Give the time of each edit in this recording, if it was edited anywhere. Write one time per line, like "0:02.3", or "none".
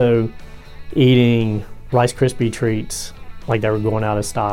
none

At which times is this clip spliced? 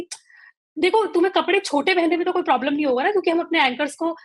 none

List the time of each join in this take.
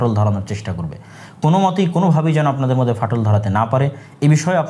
none

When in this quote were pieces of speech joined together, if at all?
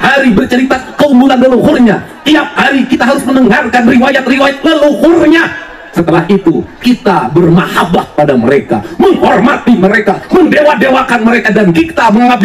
none

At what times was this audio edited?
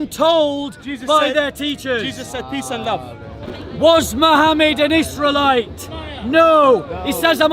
0:03.5

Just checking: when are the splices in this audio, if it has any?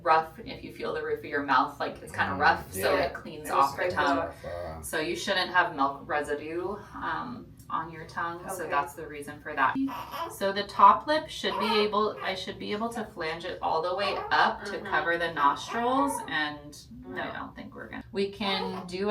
0:09.8
0:17.9

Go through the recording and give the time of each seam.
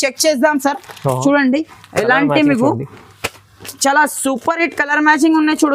none

